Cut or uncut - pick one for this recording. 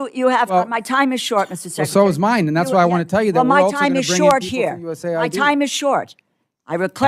uncut